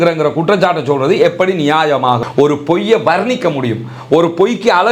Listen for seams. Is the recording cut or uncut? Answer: cut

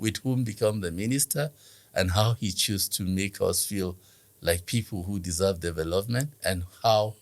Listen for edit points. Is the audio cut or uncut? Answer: cut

